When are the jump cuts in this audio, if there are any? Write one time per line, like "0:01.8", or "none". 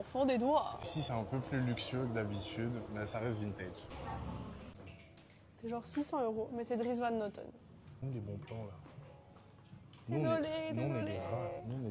none